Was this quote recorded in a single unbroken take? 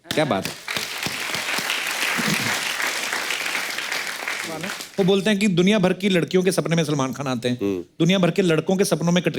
no; 1 cut; at 4.8 s

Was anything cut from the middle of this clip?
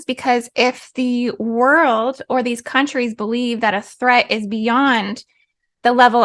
no; 0 cuts

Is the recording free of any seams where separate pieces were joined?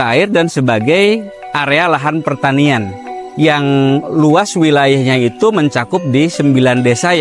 yes; 0 cuts

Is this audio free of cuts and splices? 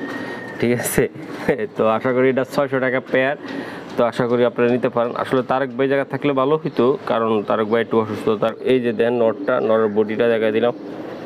no; 1 cut; at 8.6 s

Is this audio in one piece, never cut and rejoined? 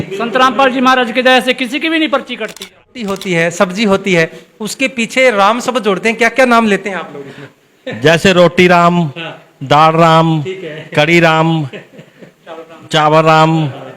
no; 1 cut; at 2.9 s

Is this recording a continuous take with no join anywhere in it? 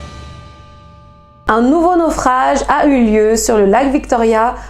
no; 1 cut; at 1.3 s

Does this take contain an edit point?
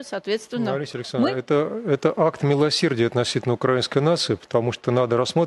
no; 0 cuts

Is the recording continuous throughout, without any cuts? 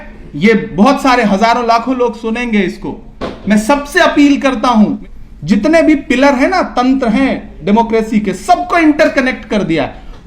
no; 1 cut; at 5.0 s

